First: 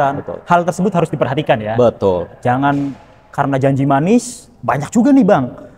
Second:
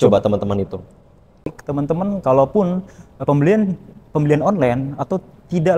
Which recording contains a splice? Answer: second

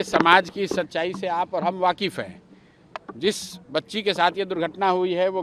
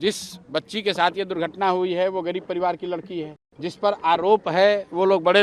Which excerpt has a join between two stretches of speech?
second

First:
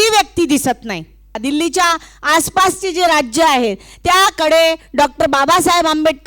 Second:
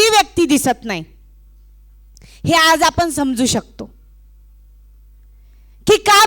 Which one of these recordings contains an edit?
first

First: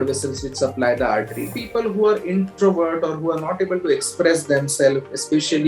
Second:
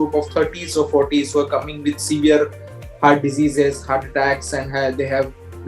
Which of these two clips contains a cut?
first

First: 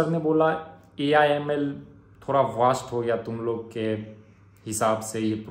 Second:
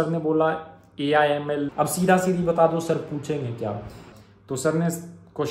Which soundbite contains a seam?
second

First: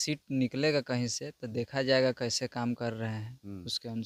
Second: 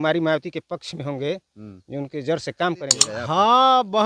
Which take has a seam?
second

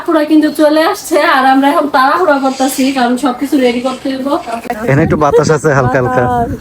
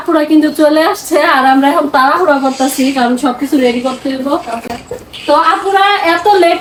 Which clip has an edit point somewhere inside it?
first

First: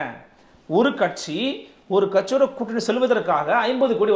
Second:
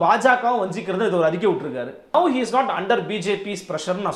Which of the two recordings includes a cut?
second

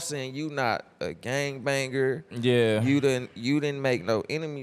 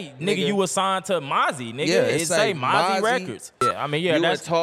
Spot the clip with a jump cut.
second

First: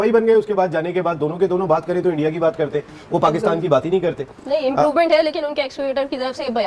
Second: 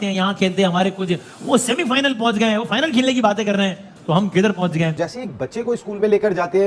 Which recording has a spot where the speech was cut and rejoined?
second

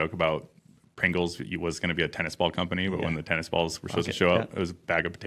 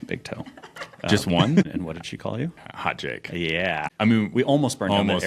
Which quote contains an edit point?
second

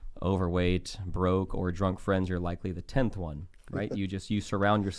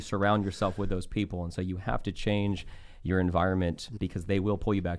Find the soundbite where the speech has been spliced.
second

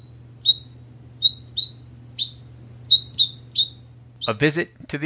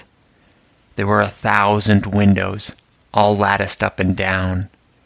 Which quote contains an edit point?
first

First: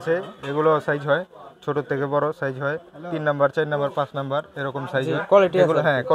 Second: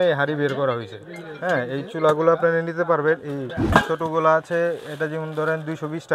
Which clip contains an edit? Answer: second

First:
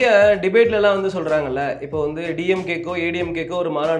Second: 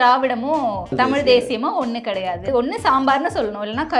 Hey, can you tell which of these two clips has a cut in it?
second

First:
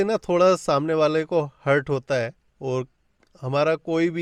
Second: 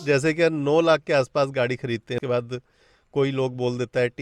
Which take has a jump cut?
second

